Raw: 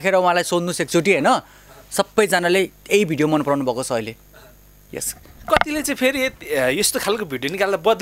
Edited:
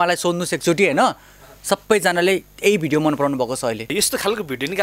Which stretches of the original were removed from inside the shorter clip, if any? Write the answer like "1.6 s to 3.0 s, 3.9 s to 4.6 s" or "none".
4.2 s to 6.7 s